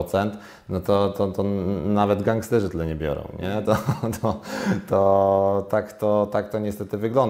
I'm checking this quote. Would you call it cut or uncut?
uncut